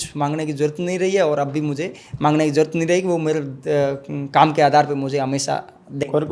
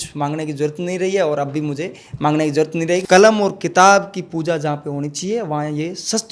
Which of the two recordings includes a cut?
second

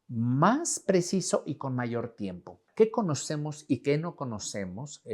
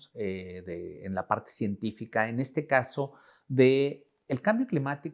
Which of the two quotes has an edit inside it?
first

